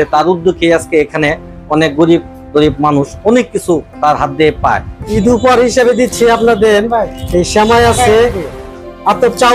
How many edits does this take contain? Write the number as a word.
one